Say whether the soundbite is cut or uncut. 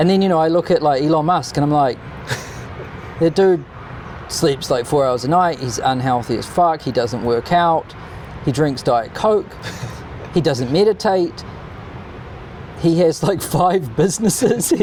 uncut